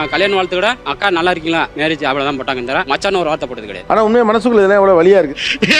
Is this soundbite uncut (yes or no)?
yes